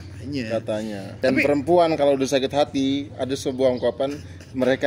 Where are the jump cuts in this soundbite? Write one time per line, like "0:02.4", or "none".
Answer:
0:01.1